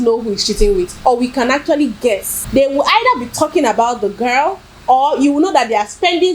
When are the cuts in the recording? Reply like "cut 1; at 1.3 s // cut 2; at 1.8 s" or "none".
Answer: cut 1; at 2.3 s